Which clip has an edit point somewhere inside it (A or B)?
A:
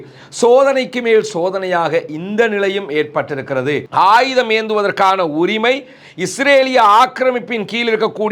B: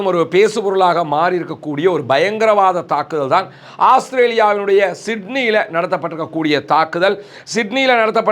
A